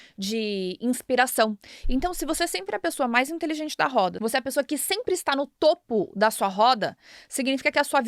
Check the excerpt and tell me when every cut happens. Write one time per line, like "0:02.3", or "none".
0:01.7
0:04.2